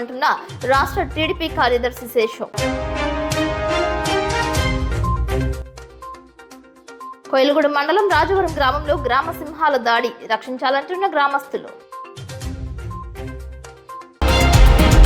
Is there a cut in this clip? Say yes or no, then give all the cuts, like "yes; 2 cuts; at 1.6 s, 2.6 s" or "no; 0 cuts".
yes; 1 cut; at 14.1 s